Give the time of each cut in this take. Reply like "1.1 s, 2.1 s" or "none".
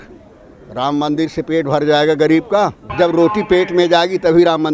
2.8 s